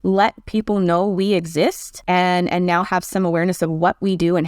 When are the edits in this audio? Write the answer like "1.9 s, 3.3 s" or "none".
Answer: 1.9 s